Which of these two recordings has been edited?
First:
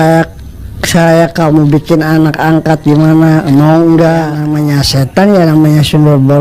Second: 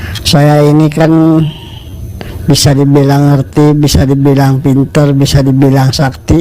first; 1 cut; at 4.4 s

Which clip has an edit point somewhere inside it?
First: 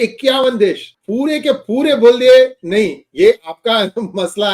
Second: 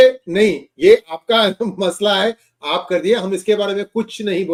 first; 1 cut; at 0.9 s

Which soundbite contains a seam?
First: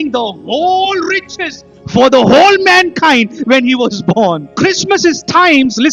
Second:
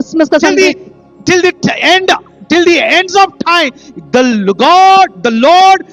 first; 1 cut; at 4.5 s

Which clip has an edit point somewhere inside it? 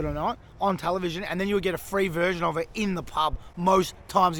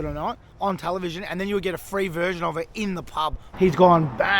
second; 1 cut; at 3.4 s

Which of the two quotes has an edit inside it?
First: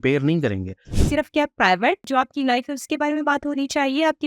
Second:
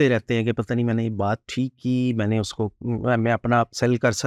first; 2 cuts; at 0.9 s, 2.0 s

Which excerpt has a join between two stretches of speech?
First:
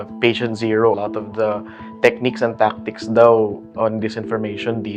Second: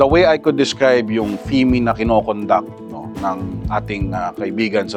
first; 1 cut; at 1.0 s

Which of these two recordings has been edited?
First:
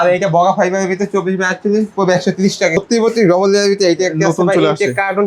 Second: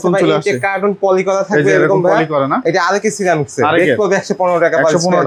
first; 1 cut; at 2.8 s

